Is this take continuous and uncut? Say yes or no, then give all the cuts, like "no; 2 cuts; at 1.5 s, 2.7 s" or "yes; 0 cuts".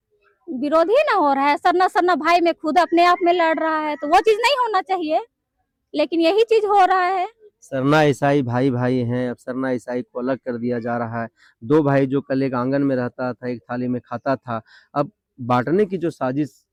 yes; 0 cuts